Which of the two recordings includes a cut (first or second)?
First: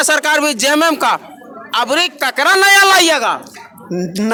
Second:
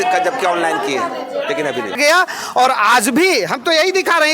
second